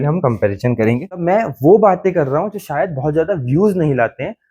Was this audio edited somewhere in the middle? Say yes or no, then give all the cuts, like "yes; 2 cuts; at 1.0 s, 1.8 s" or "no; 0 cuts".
yes; 1 cut; at 1.2 s